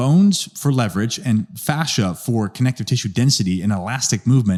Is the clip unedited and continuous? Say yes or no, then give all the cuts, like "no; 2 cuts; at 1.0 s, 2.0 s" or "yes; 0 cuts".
yes; 0 cuts